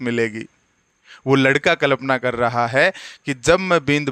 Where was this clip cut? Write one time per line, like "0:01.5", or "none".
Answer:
none